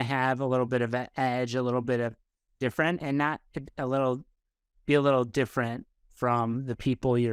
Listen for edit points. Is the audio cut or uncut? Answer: uncut